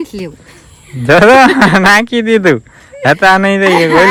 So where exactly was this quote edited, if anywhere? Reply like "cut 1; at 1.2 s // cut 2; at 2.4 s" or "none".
none